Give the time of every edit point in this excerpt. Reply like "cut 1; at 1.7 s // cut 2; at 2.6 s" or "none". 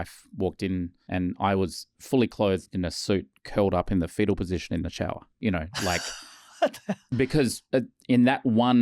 cut 1; at 1.0 s // cut 2; at 5.3 s // cut 3; at 7.0 s